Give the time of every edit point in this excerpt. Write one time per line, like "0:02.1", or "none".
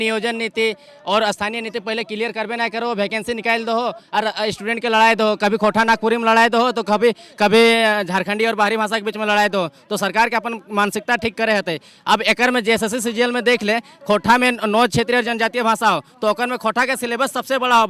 none

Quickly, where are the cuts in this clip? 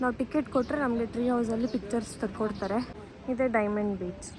0:03.0

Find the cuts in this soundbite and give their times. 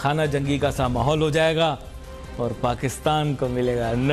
none

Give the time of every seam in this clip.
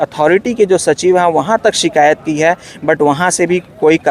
none

